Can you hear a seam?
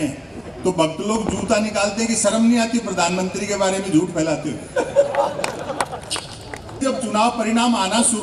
yes; 1 cut; at 6.8 s

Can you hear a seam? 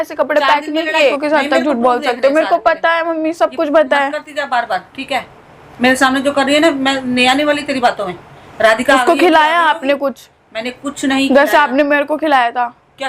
yes; 1 cut; at 1.2 s

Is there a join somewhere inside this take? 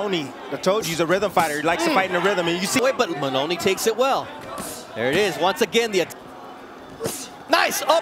no; 0 cuts

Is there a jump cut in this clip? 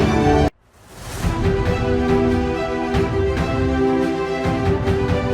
no; 0 cuts

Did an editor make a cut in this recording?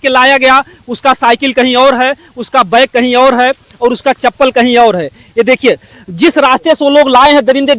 no; 0 cuts

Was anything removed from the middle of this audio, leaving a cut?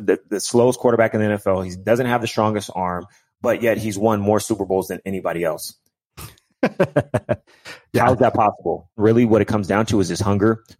yes; 1 cut; at 9.0 s

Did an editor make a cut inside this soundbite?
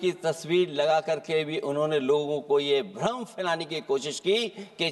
no; 0 cuts

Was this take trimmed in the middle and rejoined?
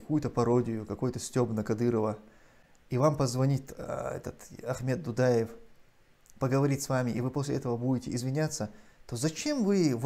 no; 0 cuts

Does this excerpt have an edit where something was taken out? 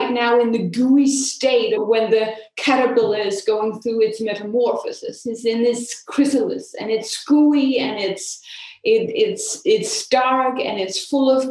yes; 1 cut; at 1.8 s

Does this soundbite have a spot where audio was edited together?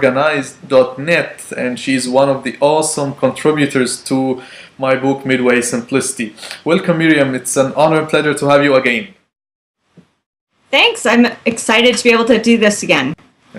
yes; 1 cut; at 11.2 s

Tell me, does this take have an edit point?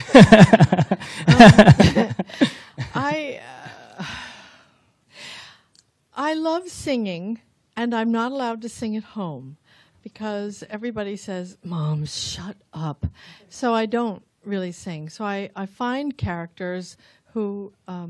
yes; 1 cut; at 13.4 s

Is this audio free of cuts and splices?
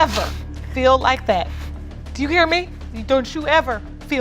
no; 1 cut; at 2.8 s

